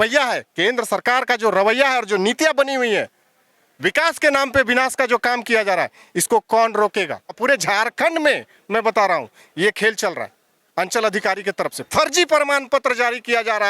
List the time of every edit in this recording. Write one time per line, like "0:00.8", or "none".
0:07.4